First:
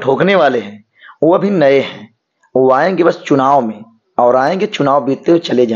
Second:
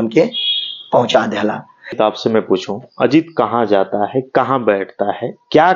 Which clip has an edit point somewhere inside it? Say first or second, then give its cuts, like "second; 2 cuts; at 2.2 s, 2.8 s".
second; 1 cut; at 2.0 s